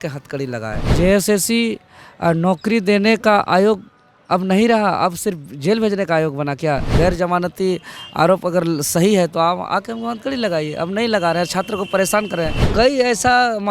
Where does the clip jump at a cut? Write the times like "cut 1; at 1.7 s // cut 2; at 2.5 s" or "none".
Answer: cut 1; at 0.9 s // cut 2; at 6.9 s // cut 3; at 12.6 s